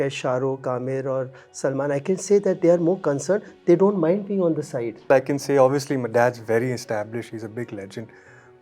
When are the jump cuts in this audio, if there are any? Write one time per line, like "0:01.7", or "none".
0:05.1